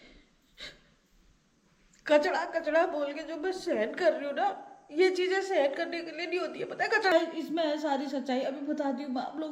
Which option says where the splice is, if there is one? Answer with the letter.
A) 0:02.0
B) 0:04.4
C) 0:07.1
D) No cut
C